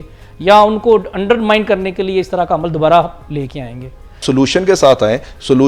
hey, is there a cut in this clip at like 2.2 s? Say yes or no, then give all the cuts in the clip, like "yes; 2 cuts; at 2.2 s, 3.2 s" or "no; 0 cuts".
no; 1 cut; at 4.2 s